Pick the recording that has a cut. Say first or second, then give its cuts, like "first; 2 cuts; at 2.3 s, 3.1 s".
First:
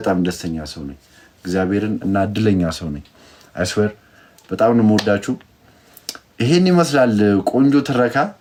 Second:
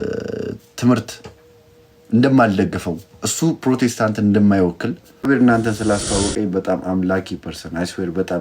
second; 1 cut; at 5.3 s